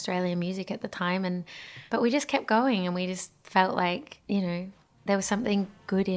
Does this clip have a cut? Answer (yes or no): no